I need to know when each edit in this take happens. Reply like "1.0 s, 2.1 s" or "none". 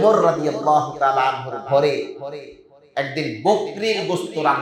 none